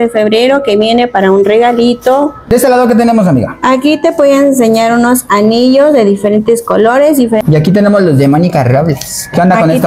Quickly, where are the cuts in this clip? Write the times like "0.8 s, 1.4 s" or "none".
2.5 s, 7.4 s